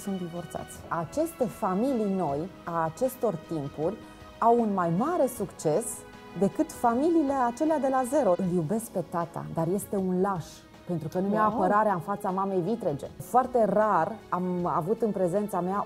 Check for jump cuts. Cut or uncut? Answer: cut